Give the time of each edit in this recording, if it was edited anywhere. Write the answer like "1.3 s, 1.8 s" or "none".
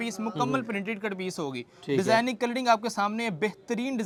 none

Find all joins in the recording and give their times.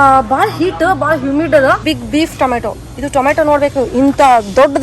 1.8 s

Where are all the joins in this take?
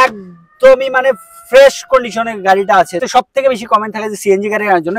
3.0 s

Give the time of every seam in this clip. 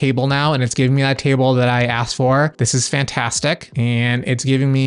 none

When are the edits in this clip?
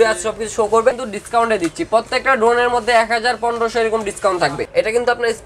0.9 s, 4.6 s

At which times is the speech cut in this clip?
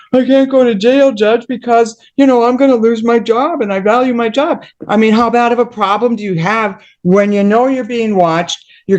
4.7 s

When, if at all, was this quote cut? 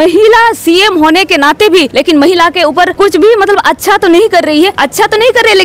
1.9 s, 2.9 s, 4.8 s

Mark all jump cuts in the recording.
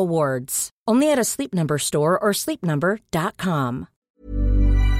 3.9 s

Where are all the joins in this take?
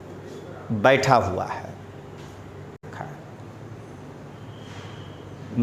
2.8 s

